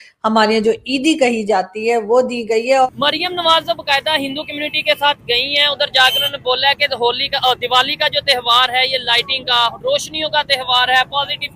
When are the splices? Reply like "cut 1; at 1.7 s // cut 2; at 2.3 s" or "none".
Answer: cut 1; at 2.9 s